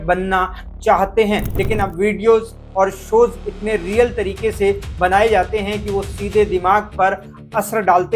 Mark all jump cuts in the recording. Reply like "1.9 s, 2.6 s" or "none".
1.5 s